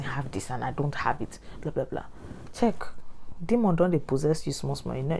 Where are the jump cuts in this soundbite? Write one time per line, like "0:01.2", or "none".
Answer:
none